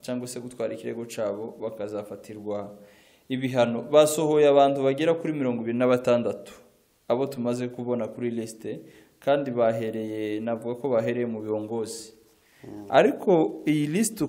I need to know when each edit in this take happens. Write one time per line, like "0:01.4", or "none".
none